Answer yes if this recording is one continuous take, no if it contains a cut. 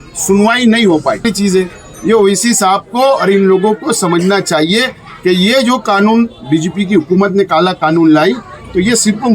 no